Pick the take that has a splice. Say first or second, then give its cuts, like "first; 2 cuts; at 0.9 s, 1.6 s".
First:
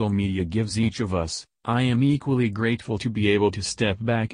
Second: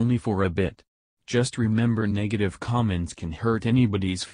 first; 1 cut; at 1.0 s